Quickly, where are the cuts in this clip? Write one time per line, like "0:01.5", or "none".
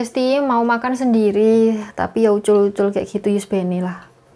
none